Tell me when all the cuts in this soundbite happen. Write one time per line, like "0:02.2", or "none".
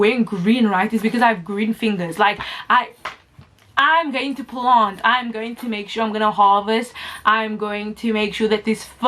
none